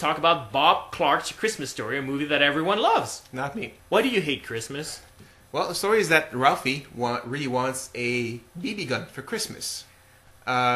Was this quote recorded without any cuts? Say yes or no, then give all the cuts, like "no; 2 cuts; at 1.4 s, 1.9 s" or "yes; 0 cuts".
yes; 0 cuts